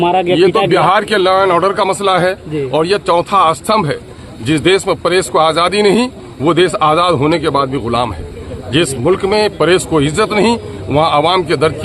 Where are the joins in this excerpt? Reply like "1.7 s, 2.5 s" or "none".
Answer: none